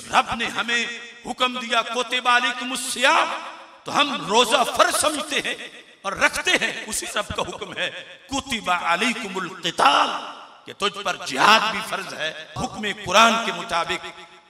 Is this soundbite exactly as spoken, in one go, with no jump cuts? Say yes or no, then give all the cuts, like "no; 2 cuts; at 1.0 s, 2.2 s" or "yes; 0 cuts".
no; 1 cut; at 12.6 s